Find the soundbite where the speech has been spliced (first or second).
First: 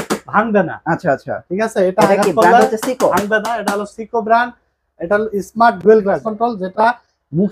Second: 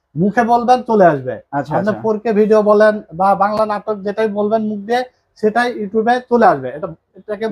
first